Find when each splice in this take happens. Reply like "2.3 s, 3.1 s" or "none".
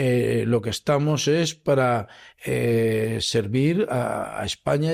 none